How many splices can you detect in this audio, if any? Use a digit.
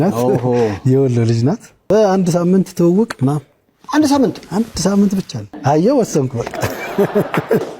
2